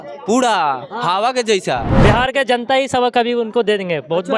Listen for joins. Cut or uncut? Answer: cut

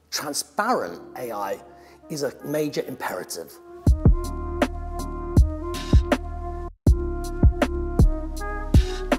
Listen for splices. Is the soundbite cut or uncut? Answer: cut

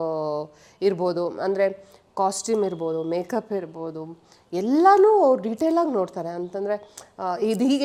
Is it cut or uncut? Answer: uncut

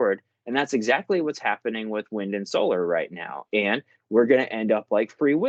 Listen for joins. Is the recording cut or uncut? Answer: uncut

